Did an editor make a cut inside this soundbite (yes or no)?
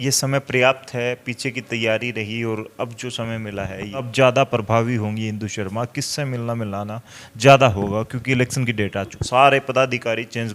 yes